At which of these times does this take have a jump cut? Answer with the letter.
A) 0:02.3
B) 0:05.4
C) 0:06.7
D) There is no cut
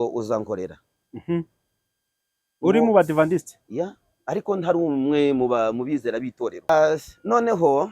C